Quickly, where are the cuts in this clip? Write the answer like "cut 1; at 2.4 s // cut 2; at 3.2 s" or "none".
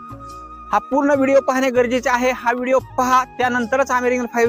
none